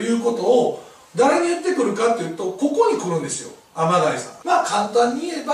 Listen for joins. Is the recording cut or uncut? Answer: cut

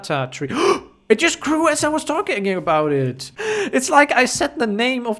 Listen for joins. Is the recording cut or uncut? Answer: cut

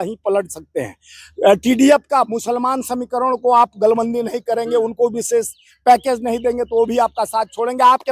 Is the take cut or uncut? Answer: uncut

